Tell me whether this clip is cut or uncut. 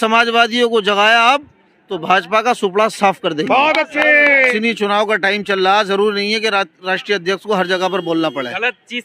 cut